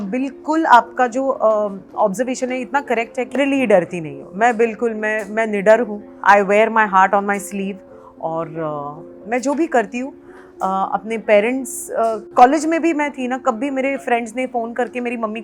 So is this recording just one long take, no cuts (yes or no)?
no